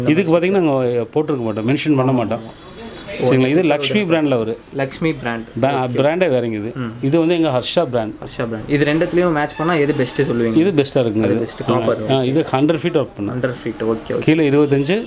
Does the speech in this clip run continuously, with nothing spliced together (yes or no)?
yes